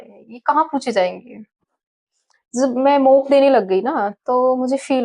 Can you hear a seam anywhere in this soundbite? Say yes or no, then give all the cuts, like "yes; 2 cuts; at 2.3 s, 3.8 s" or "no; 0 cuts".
no; 0 cuts